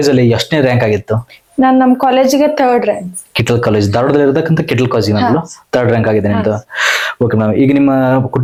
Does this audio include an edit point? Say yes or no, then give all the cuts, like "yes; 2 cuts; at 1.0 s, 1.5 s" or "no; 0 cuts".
no; 0 cuts